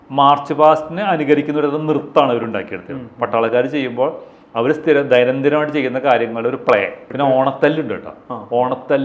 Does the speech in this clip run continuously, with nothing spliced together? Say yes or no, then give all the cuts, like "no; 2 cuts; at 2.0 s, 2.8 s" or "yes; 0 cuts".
no; 1 cut; at 7.0 s